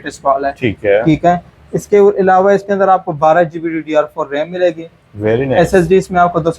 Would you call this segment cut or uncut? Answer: uncut